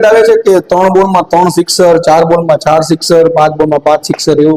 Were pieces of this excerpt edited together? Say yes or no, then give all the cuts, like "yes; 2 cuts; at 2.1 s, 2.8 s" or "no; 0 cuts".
no; 0 cuts